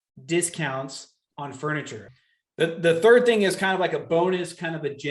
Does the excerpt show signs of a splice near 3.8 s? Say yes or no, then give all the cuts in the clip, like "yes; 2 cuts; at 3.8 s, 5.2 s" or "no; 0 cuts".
no; 1 cut; at 2.1 s